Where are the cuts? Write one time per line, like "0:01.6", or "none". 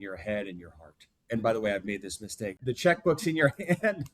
0:01.1
0:02.6